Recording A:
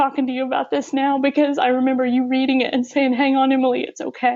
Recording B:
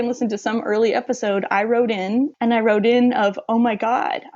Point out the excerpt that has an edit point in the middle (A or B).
B